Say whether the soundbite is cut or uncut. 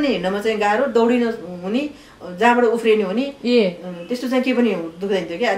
uncut